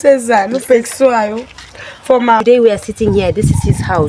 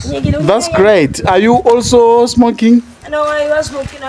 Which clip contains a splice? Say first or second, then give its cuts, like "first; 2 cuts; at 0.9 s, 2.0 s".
first; 1 cut; at 2.4 s